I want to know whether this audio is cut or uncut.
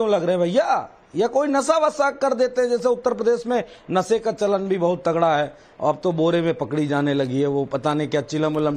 uncut